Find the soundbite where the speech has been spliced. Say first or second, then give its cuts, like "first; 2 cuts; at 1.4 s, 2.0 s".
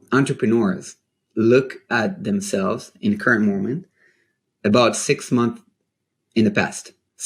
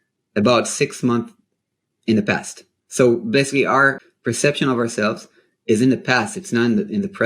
second; 1 cut; at 4.1 s